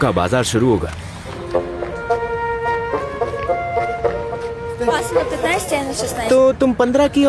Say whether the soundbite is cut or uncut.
uncut